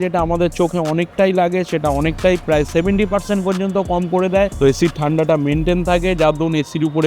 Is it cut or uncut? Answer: cut